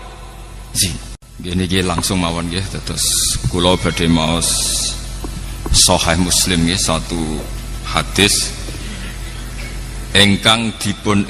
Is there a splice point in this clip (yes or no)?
yes